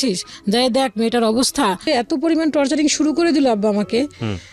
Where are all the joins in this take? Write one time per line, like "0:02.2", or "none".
0:01.8